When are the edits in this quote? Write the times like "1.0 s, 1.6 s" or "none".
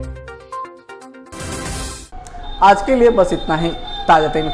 none